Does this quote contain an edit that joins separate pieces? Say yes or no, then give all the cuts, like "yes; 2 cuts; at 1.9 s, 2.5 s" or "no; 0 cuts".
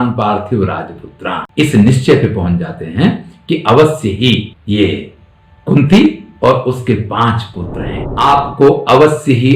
yes; 1 cut; at 8.0 s